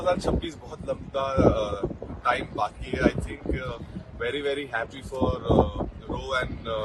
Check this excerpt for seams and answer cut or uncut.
uncut